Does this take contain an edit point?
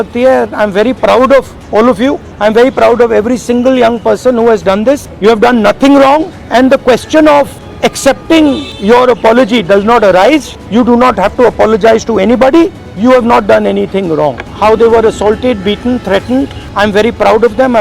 yes; 9 cuts; at 1.9 s, 5.1 s, 6.4 s, 7.6 s, 8.7 s, 10.6 s, 12.8 s, 14.4 s, 16.6 s

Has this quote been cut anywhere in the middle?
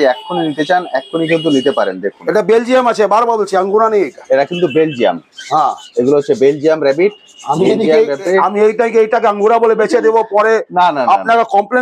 no; 0 cuts

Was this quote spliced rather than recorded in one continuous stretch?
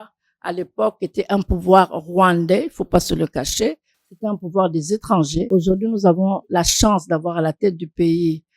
yes; 1 cut; at 5.5 s

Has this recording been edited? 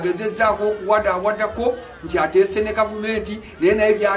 no; 0 cuts

